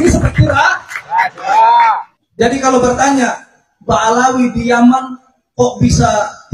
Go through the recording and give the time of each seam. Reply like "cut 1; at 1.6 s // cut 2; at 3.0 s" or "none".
cut 1; at 2.1 s